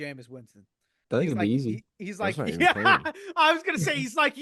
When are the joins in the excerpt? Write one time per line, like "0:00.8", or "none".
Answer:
none